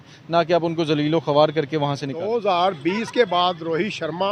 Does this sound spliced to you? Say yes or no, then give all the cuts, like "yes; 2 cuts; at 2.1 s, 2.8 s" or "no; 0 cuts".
yes; 1 cut; at 2.2 s